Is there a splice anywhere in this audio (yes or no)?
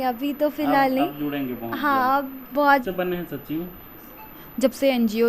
yes